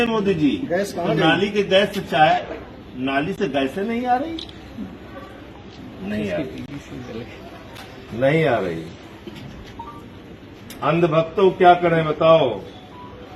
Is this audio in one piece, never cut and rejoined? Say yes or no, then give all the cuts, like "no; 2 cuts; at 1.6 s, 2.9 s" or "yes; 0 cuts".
yes; 0 cuts